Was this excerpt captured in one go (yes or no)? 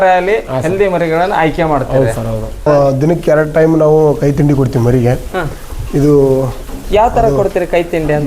no